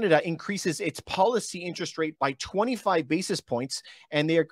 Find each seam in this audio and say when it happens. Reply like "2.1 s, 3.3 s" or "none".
2.1 s